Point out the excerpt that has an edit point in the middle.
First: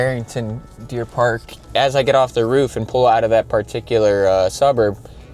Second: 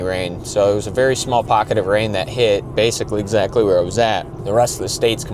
first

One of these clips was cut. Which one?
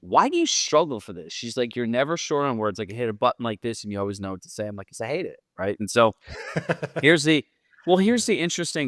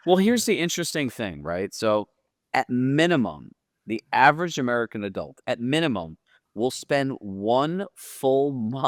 first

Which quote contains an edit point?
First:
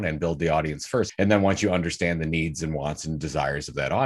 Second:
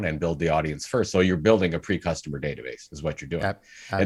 first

